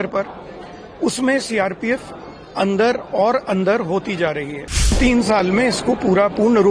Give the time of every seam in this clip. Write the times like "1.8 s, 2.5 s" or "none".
5.0 s